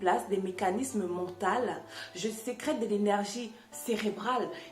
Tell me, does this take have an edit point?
no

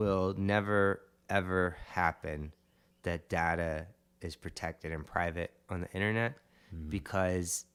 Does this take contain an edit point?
no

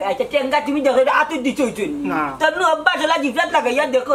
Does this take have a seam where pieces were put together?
no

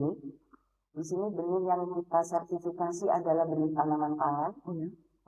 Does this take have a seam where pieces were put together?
no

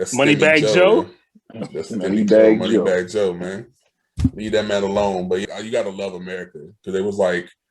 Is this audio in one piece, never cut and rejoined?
no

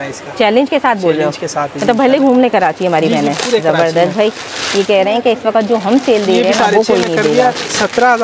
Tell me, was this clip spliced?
no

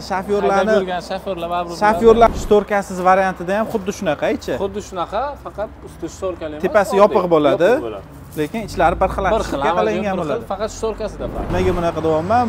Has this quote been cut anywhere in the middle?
yes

